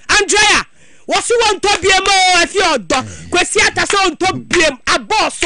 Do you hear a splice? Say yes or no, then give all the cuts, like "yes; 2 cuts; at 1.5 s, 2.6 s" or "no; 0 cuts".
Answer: no; 0 cuts